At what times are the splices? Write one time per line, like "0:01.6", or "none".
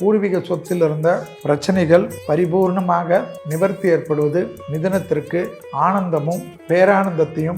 0:01.3
0:02.2
0:03.4
0:04.6
0:05.6
0:06.5